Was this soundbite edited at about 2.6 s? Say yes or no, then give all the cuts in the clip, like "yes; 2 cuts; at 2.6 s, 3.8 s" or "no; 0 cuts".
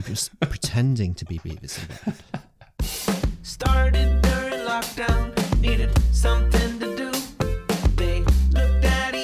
yes; 1 cut; at 2.6 s